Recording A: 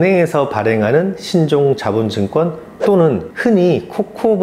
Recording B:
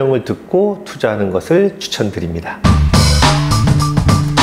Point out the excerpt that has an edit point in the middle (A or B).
B